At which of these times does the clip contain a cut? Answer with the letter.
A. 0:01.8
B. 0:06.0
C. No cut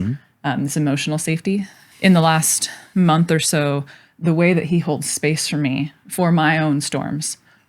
A